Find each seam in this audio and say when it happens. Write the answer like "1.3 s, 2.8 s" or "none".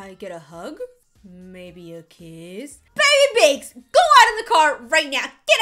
2.8 s